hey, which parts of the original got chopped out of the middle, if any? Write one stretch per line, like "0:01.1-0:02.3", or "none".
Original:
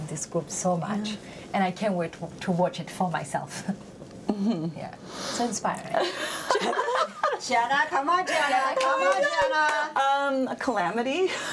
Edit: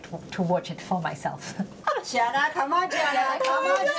0:03.9-0:07.1